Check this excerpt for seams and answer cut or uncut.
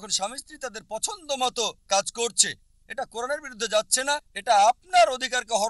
uncut